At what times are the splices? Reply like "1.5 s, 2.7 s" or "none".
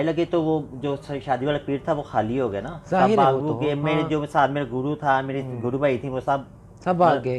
none